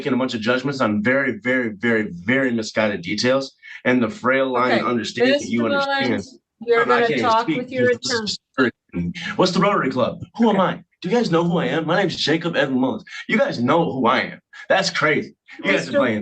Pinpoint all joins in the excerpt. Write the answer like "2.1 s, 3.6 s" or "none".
none